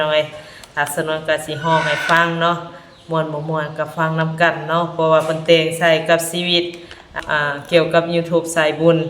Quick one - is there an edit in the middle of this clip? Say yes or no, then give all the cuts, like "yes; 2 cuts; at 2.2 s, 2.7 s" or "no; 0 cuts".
yes; 1 cut; at 7.2 s